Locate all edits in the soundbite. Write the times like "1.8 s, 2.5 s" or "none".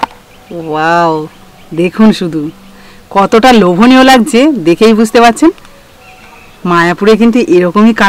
none